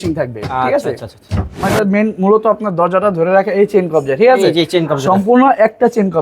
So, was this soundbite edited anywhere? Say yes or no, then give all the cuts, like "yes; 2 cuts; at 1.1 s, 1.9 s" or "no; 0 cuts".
yes; 1 cut; at 1.6 s